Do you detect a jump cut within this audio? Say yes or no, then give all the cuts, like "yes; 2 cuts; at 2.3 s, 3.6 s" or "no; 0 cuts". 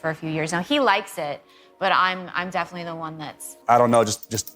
yes; 1 cut; at 3.5 s